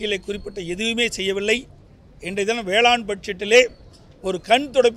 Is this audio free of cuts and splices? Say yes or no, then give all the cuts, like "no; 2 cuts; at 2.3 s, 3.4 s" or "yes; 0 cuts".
yes; 0 cuts